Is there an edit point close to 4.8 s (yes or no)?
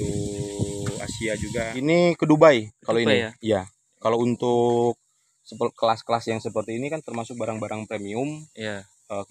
no